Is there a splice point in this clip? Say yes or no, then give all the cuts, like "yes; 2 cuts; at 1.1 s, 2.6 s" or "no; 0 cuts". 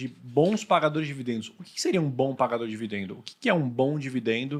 no; 0 cuts